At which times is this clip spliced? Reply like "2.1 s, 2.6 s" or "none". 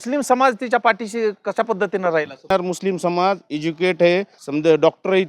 2.5 s, 4.4 s